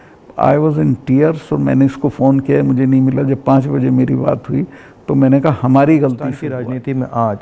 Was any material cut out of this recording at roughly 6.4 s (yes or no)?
yes